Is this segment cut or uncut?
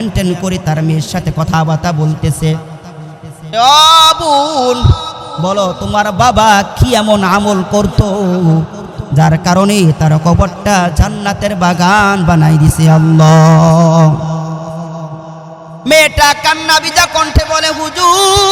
uncut